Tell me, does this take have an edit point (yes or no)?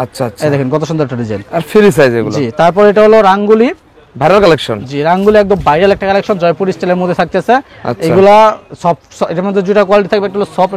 no